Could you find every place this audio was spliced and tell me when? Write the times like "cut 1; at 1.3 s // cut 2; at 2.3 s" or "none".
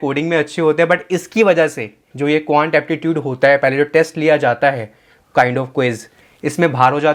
none